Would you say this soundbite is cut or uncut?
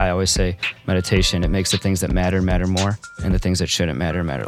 cut